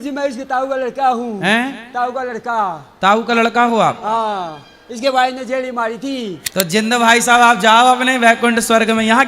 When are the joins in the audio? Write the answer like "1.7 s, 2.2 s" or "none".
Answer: 6.7 s